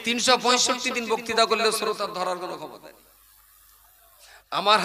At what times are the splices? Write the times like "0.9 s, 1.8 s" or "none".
2.8 s